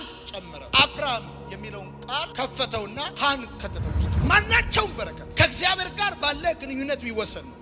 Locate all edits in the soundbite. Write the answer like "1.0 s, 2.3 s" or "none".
4.1 s